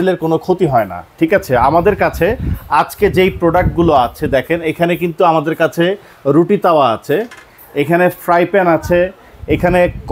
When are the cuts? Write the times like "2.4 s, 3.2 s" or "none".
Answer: none